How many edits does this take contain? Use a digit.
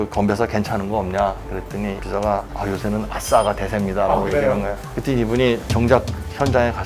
0